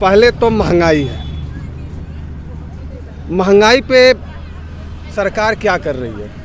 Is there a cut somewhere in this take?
no; 0 cuts

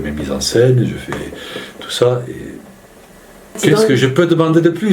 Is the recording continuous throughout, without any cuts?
no; 1 cut; at 3.6 s

